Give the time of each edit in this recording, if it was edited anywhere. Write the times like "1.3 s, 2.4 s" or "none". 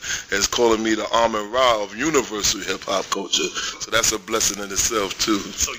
3.5 s